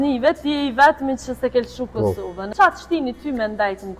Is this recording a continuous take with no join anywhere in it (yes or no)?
no